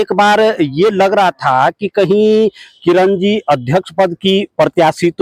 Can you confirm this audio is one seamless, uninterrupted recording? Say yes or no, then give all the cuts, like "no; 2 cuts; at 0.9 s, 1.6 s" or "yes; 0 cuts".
yes; 0 cuts